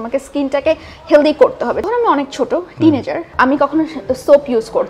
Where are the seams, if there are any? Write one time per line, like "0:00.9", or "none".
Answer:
0:01.8
0:03.3